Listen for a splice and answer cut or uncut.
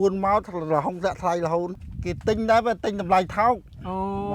cut